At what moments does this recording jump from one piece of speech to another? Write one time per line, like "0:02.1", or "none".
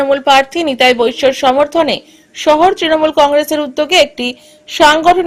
none